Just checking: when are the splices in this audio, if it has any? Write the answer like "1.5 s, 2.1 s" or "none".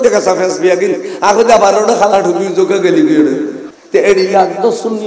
3.7 s